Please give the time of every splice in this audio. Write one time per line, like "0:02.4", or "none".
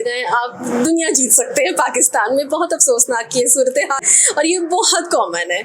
none